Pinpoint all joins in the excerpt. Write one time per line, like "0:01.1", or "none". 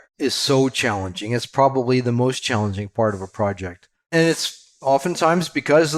none